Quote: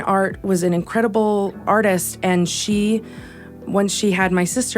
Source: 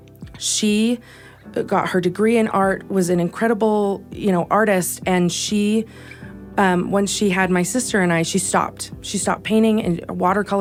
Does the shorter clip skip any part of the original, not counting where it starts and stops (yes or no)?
yes